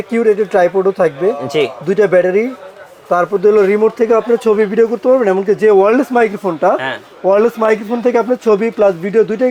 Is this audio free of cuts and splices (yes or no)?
yes